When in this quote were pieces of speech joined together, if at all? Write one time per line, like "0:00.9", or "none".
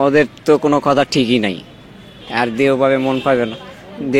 0:01.7